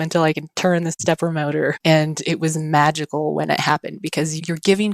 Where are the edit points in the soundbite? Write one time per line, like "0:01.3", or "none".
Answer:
0:01.8